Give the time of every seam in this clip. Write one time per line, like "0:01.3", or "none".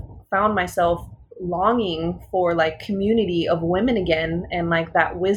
none